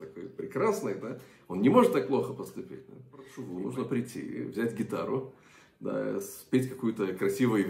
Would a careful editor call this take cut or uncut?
cut